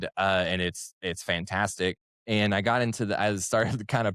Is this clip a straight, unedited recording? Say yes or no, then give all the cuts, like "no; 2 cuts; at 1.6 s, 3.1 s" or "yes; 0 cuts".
no; 1 cut; at 2.1 s